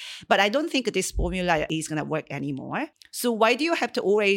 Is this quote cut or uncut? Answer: cut